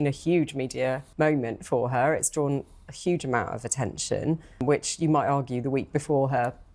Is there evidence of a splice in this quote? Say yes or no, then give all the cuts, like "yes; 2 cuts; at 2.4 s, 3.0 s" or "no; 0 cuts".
yes; 2 cuts; at 1.0 s, 4.6 s